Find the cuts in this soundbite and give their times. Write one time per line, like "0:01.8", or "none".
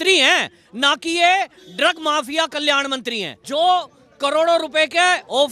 0:03.4